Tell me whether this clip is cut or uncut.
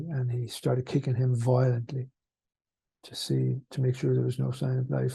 uncut